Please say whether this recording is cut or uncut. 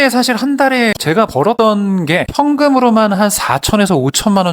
cut